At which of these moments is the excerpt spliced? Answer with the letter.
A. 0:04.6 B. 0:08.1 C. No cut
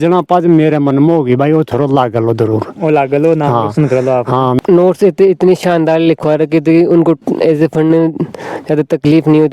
A